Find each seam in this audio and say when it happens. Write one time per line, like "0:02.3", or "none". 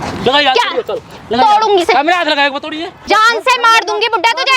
0:02.9